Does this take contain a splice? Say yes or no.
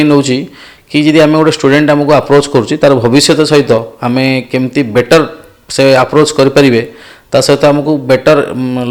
no